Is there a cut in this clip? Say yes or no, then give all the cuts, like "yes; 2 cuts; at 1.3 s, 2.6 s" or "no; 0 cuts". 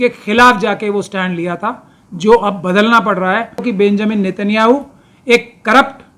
yes; 1 cut; at 3.7 s